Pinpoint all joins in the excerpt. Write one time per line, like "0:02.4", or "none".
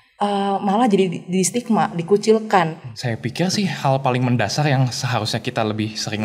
0:02.9